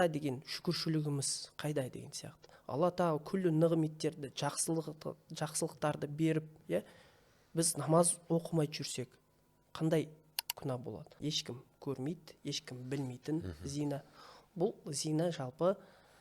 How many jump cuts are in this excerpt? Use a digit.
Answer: 1